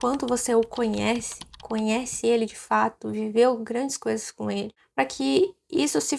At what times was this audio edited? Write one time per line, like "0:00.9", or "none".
0:04.8